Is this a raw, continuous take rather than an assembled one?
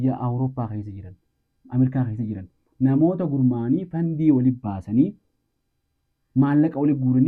yes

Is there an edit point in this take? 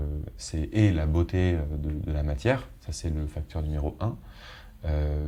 no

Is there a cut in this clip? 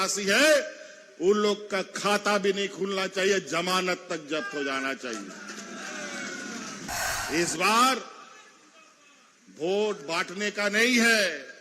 yes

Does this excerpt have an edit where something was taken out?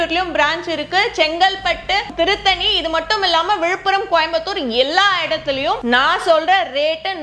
yes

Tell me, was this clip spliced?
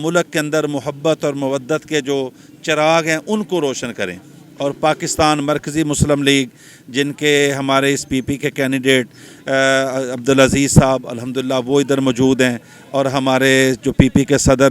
no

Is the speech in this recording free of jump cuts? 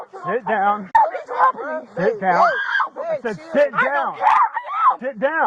yes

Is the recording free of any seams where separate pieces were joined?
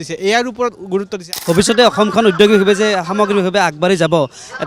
no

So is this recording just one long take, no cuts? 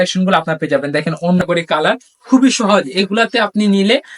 no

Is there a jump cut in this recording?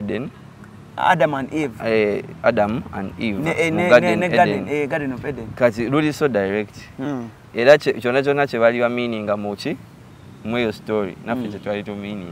no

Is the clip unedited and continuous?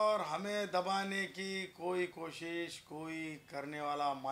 yes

